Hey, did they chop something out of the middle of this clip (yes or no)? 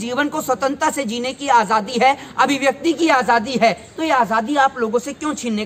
no